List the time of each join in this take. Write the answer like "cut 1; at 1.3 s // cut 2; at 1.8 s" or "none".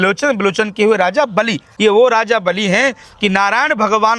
cut 1; at 1.7 s